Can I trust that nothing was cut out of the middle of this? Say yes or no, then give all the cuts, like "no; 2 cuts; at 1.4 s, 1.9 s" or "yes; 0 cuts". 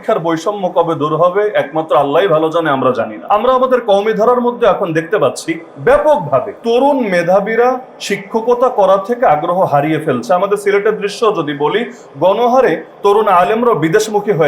no; 2 cuts; at 3.2 s, 6.5 s